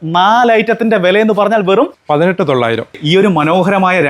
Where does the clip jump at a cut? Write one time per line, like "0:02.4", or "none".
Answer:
0:02.0
0:02.9